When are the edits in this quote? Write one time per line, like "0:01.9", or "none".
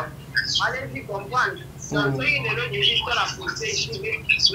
none